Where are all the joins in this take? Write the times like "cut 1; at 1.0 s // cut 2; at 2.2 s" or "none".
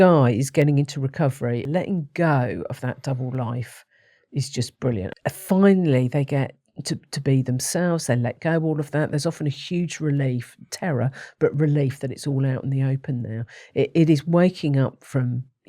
cut 1; at 1.7 s // cut 2; at 5.1 s